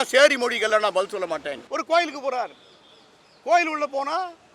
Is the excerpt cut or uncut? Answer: cut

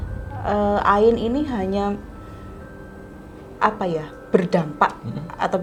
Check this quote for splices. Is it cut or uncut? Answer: uncut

